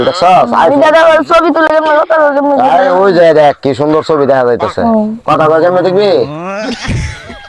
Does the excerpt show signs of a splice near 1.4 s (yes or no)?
no